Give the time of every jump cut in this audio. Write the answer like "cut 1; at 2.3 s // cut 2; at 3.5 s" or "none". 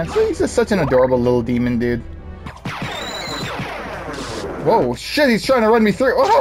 cut 1; at 2.4 s